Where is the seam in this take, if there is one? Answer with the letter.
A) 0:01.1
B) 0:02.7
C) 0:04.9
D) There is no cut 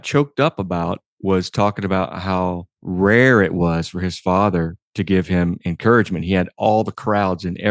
B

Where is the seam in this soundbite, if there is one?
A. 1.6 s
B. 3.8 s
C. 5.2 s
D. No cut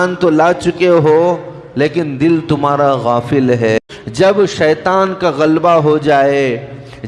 B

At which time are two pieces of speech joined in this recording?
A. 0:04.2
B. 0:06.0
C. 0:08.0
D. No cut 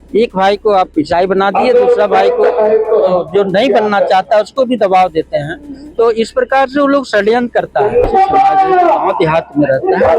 C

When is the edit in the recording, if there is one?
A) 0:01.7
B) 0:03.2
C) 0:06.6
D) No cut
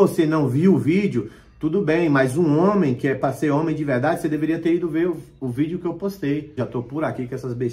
C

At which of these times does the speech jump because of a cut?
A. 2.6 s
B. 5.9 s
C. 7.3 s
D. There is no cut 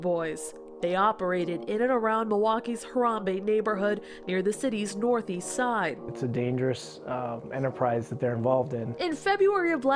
D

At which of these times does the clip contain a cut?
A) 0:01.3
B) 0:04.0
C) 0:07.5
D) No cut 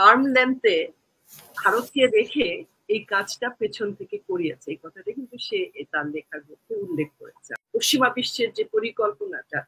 C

